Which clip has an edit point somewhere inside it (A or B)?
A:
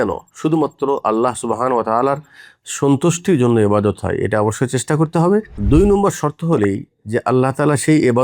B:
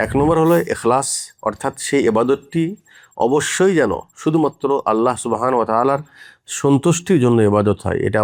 A